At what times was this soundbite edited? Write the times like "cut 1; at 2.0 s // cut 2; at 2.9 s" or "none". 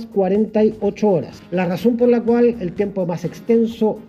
cut 1; at 1.4 s